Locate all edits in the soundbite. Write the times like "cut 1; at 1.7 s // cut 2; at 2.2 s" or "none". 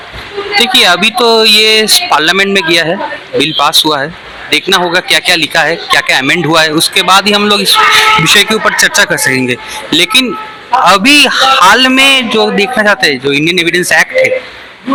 none